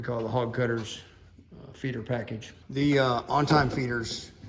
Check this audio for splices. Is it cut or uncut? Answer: cut